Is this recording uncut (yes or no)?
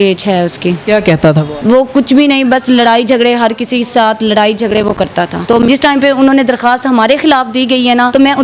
no